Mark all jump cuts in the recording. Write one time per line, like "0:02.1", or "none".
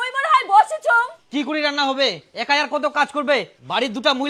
none